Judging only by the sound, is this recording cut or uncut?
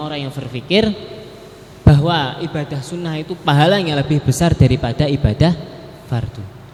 uncut